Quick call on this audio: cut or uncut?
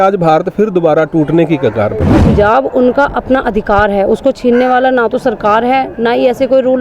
cut